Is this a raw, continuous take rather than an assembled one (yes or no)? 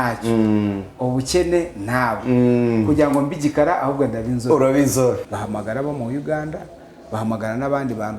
no